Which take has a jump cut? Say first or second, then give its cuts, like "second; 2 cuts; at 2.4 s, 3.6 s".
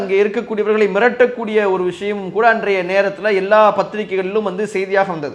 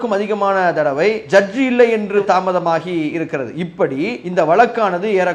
second; 3 cuts; at 1.2 s, 2.2 s, 4.2 s